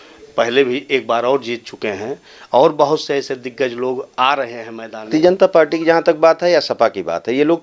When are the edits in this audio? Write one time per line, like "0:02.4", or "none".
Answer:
0:05.1